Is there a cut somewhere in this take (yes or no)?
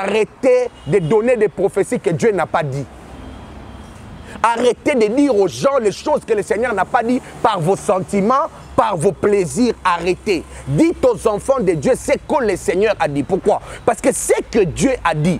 no